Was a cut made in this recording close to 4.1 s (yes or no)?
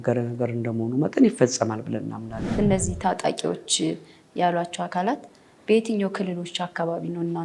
no